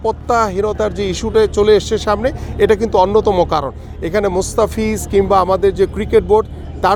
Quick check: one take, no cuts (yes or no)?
yes